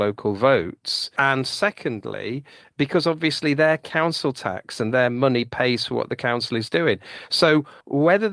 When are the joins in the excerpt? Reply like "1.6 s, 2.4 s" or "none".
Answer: 1.1 s